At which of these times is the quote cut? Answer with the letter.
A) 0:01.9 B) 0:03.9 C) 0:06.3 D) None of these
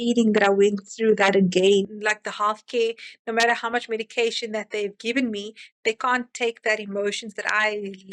A